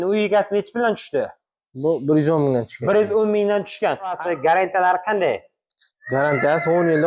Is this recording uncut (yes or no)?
no